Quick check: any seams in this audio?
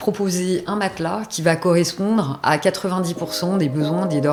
no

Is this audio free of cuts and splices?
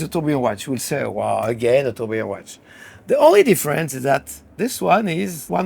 no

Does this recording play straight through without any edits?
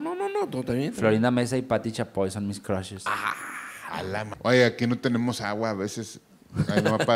no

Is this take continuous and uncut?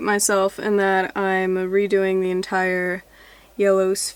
yes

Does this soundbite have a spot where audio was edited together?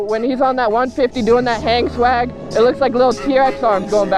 no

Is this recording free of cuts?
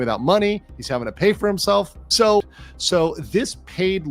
no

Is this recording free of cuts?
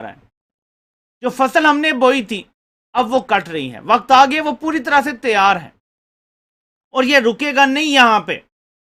yes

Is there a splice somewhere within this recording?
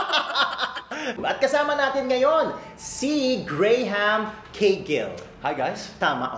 yes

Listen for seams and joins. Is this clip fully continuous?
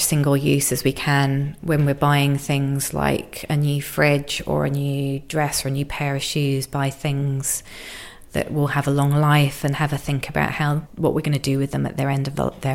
yes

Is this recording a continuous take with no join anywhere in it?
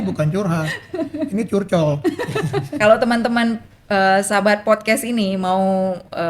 no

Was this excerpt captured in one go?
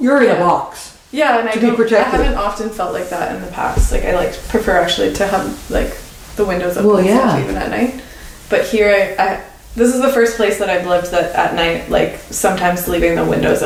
yes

